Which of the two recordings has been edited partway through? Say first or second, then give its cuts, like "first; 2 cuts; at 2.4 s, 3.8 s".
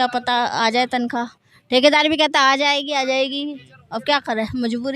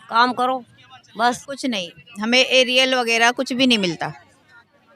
second; 1 cut; at 1.5 s